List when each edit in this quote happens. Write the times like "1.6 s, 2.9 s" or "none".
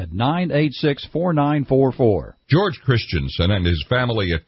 2.3 s